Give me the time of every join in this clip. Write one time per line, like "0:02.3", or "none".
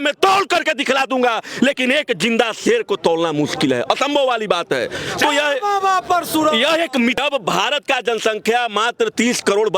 0:07.2